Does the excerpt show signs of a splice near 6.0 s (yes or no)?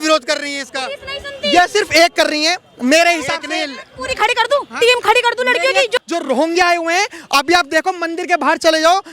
yes